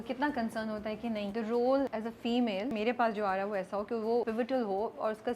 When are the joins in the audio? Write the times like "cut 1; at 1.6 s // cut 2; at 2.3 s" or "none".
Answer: cut 1; at 1.3 s // cut 2; at 2.4 s // cut 3; at 4.3 s